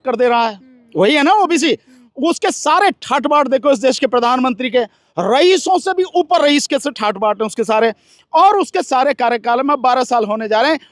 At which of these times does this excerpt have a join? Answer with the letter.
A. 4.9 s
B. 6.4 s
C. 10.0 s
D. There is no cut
D